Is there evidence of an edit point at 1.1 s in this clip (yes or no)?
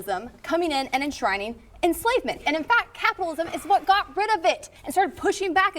no